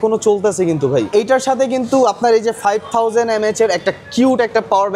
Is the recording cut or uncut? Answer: cut